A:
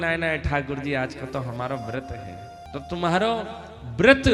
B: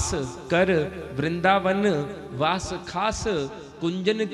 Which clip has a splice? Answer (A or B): A